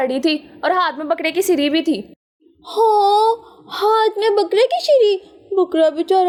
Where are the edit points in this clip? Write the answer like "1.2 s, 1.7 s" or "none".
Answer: none